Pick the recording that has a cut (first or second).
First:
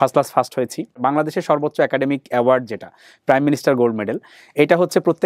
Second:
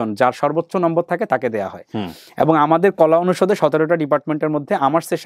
first